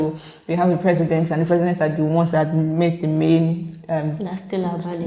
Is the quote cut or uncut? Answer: uncut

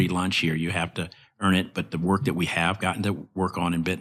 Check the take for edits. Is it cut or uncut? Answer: uncut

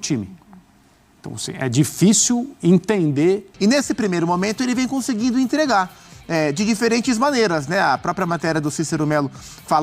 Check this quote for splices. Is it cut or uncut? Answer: cut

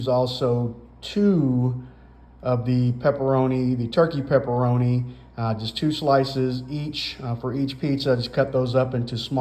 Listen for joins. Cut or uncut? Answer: uncut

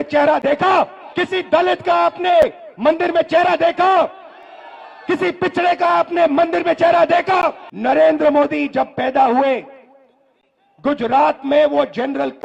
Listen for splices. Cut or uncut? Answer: cut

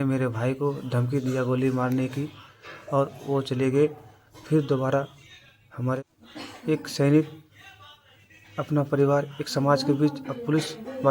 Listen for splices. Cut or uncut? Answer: cut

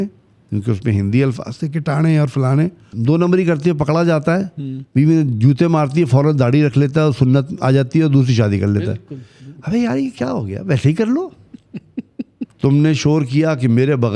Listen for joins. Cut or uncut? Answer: cut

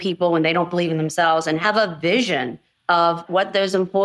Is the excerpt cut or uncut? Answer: cut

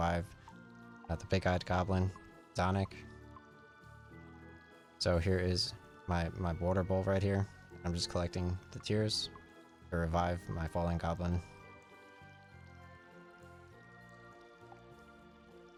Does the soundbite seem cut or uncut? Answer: uncut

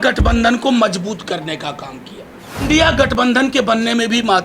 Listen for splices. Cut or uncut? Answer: cut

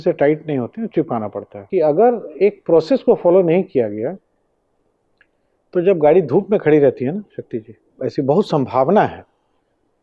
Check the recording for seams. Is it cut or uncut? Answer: cut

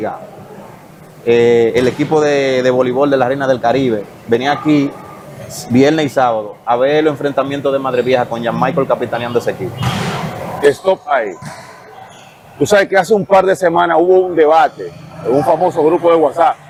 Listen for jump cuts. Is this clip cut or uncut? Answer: uncut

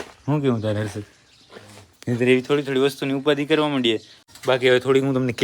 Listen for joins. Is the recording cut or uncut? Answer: cut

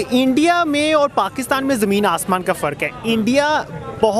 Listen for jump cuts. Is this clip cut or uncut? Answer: uncut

